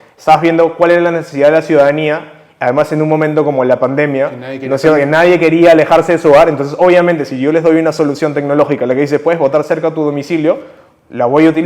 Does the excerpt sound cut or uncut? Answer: uncut